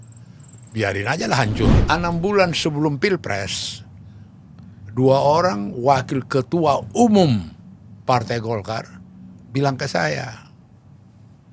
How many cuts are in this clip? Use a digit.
1